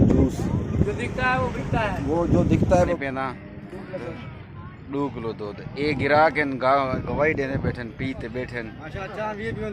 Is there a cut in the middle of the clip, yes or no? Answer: yes